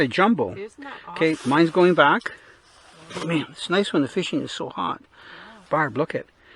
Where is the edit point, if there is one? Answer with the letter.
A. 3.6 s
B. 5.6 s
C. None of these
B